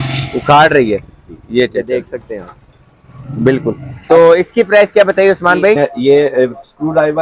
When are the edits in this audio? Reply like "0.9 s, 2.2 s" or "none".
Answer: 5.8 s